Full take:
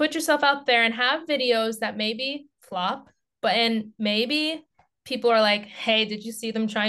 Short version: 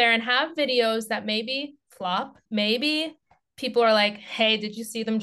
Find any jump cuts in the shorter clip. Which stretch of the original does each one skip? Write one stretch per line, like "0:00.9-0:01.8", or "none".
0:03.1-0:03.9